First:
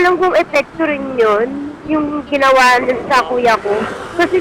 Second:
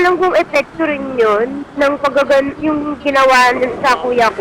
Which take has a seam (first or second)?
first